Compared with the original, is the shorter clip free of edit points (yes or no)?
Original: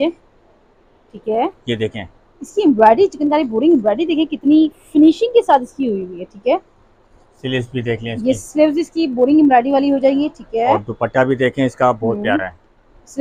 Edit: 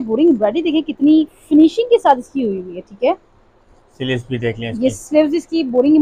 yes